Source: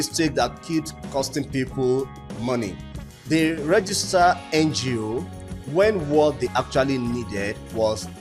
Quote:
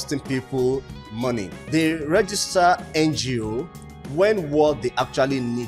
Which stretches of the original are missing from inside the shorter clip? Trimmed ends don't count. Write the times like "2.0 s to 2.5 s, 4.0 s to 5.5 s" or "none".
2.8 s to 3.1 s